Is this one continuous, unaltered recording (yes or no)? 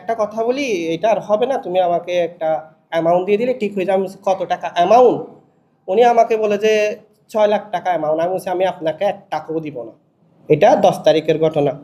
yes